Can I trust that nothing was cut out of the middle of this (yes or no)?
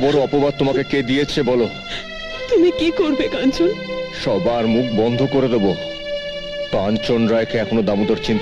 yes